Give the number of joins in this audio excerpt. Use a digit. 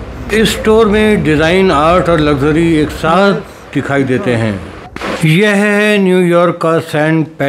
1